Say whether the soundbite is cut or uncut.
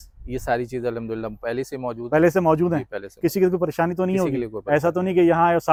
uncut